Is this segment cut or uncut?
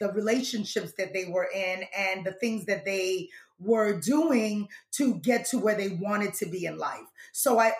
uncut